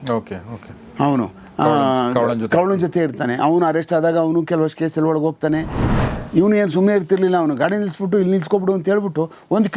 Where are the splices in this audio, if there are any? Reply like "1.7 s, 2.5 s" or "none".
5.8 s